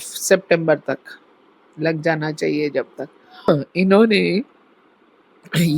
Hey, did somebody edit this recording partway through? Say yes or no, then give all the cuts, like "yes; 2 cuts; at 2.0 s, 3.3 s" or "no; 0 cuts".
yes; 1 cut; at 3.5 s